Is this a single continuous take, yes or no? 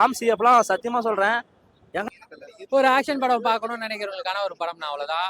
no